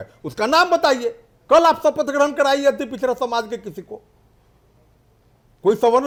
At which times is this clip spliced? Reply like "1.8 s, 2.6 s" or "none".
none